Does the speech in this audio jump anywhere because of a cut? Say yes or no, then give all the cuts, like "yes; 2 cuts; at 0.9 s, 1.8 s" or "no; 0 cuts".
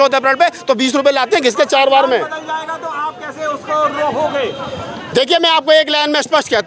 no; 0 cuts